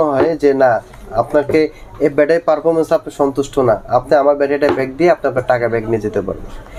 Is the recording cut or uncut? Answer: uncut